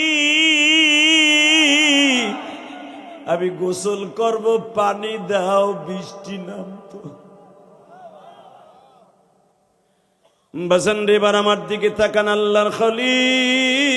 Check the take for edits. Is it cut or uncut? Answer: cut